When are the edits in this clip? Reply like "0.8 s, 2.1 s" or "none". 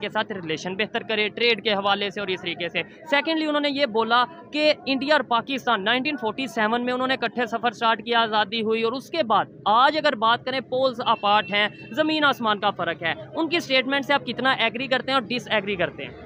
none